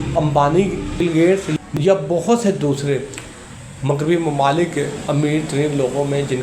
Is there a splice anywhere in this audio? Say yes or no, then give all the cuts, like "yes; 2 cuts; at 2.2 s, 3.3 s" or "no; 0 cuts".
yes; 1 cut; at 1.7 s